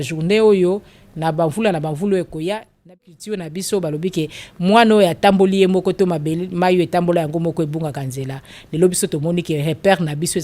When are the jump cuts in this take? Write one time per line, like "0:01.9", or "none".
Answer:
0:03.2